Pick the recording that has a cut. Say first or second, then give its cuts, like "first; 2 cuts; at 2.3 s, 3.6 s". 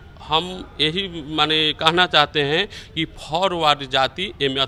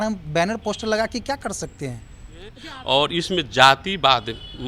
second; 1 cut; at 2.7 s